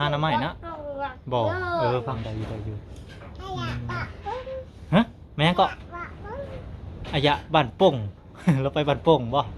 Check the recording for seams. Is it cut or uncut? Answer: cut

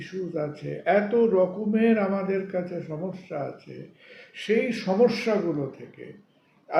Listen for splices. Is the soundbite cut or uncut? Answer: uncut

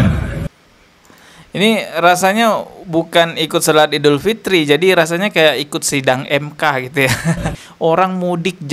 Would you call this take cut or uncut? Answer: cut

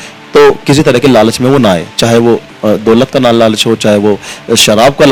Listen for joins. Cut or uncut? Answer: uncut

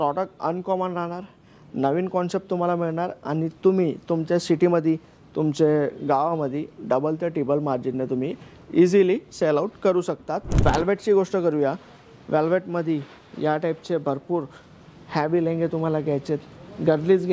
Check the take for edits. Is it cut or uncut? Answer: cut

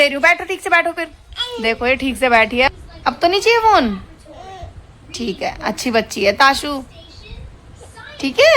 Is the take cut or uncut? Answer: cut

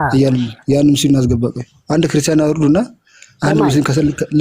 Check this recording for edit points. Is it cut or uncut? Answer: uncut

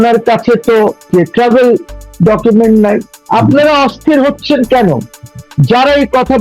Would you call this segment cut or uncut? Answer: cut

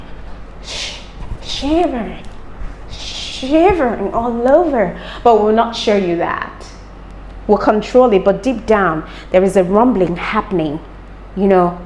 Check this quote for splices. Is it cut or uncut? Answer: uncut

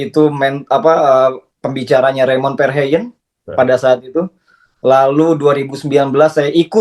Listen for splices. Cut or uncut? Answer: uncut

